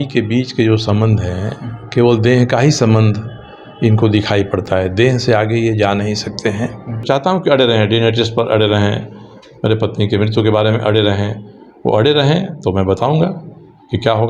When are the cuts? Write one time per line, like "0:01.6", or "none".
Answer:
0:07.0

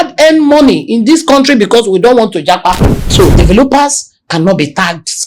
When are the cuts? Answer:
0:03.1

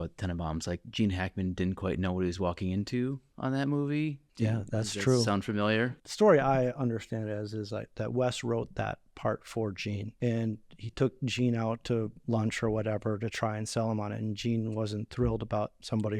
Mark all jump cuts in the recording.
0:04.2
0:06.0
0:10.1

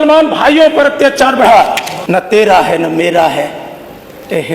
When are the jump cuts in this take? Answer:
0:01.9

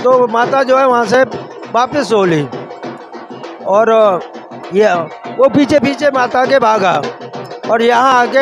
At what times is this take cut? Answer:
none

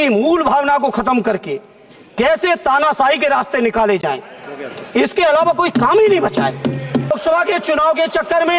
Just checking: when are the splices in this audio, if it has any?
0:07.1

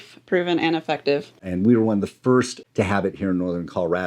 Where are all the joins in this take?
0:01.4

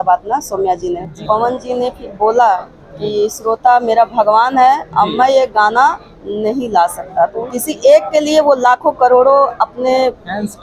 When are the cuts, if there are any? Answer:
0:01.1
0:07.4

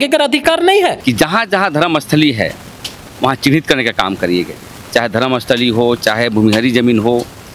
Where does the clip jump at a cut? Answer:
0:01.0

